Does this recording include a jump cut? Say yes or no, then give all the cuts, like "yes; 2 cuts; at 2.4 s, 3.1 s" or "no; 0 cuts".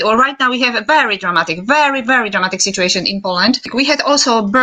yes; 1 cut; at 3.7 s